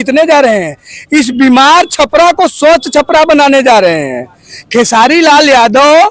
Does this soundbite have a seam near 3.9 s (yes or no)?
no